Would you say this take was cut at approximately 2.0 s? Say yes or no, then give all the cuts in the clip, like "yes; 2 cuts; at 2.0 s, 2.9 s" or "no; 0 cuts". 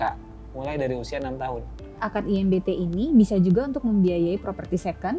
yes; 1 cut; at 2.0 s